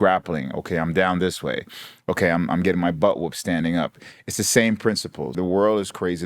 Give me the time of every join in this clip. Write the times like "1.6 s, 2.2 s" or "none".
5.3 s